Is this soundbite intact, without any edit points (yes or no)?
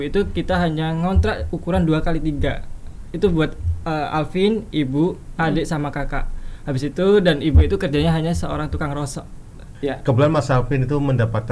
no